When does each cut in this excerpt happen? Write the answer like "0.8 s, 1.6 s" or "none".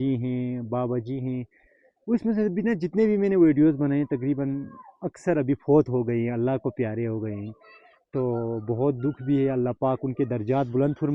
none